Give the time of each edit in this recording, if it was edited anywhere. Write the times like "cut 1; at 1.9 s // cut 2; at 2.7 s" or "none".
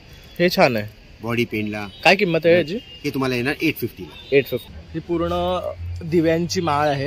cut 1; at 4.7 s